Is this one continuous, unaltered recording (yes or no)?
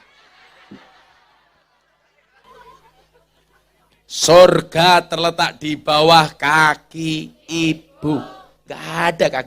no